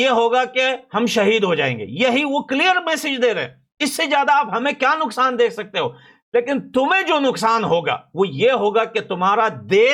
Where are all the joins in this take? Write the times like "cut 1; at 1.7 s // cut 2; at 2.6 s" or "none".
none